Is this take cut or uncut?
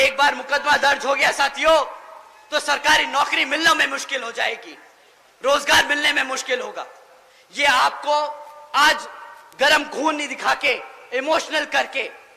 uncut